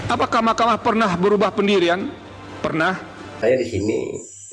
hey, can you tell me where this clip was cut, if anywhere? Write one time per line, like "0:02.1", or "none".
0:03.4